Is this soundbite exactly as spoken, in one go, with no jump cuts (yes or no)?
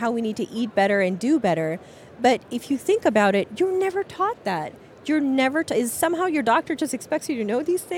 yes